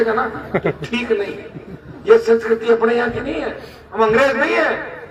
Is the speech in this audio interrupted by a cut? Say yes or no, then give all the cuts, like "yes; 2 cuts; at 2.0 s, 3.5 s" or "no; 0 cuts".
no; 0 cuts